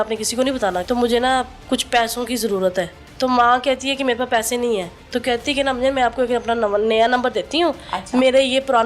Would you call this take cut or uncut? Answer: cut